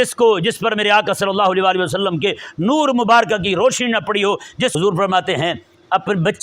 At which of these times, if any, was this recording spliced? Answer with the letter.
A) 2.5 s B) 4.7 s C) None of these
B